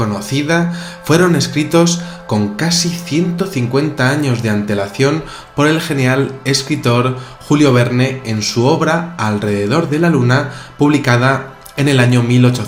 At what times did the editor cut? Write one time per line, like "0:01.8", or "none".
none